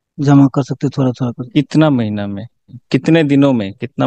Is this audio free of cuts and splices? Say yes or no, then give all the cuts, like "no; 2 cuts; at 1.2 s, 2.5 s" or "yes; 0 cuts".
no; 1 cut; at 2.7 s